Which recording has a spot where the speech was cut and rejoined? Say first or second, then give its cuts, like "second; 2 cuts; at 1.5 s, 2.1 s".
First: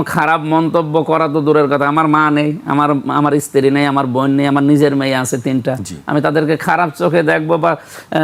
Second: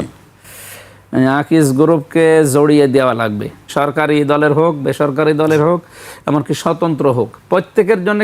second; 1 cut; at 3.7 s